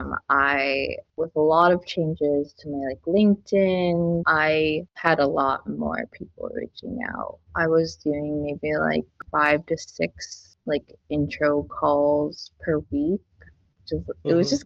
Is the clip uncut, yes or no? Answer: yes